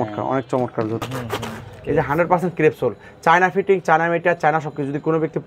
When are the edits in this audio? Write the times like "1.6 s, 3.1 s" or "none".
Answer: 1.0 s